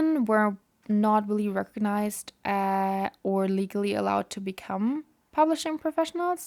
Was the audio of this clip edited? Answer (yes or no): no